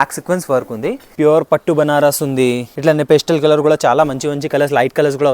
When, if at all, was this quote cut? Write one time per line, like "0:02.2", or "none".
0:01.0
0:02.7